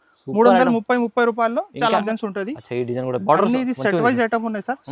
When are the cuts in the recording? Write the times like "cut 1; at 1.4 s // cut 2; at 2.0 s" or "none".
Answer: cut 1; at 2.1 s